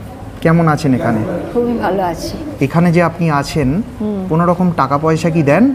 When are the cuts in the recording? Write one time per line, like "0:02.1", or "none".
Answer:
0:02.5